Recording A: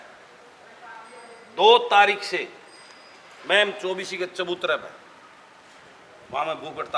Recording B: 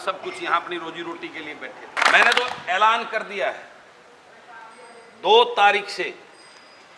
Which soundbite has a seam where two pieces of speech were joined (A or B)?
B